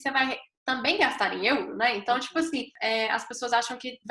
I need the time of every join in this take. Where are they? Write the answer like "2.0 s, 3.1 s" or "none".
2.7 s